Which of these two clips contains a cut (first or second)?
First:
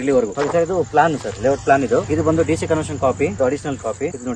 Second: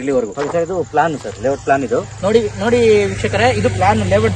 first